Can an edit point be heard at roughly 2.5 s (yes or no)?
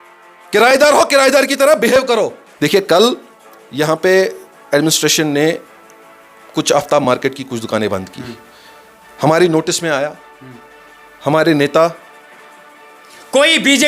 yes